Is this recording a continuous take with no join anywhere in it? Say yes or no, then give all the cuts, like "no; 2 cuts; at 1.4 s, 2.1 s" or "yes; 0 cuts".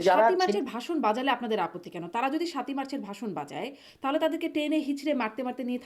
yes; 0 cuts